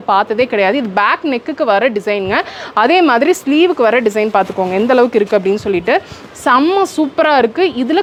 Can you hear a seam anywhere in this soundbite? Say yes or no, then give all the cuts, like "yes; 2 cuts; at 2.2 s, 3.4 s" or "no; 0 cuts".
no; 0 cuts